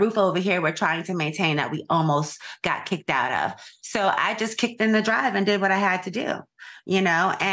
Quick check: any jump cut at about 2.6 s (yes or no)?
no